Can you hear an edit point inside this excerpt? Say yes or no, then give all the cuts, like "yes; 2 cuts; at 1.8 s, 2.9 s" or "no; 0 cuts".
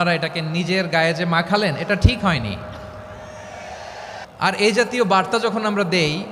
yes; 1 cut; at 4.3 s